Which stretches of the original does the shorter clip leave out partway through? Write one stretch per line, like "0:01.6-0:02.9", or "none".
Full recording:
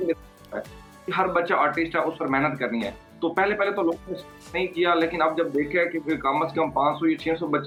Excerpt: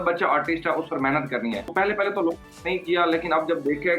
0:03.0-0:03.3
0:04.1-0:04.4